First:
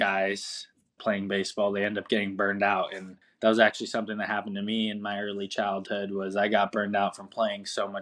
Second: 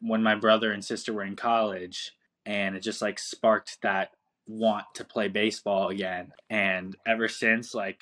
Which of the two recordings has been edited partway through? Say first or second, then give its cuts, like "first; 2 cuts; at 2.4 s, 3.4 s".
first; 1 cut; at 1.0 s